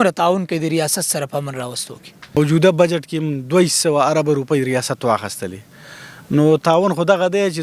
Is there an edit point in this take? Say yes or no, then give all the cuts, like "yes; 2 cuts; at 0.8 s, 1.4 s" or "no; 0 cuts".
yes; 1 cut; at 2.3 s